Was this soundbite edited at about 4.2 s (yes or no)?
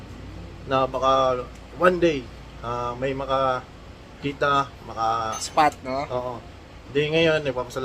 yes